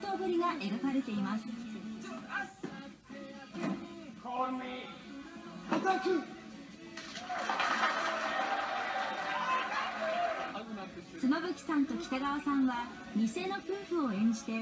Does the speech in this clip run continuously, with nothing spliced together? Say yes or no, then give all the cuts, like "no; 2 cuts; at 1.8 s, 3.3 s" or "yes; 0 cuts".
yes; 0 cuts